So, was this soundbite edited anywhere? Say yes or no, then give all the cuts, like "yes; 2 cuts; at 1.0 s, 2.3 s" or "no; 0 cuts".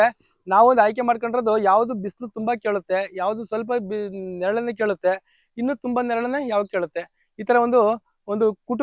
no; 0 cuts